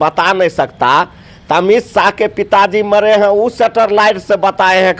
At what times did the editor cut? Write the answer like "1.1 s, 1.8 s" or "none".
none